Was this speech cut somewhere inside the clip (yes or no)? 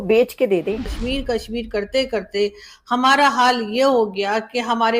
yes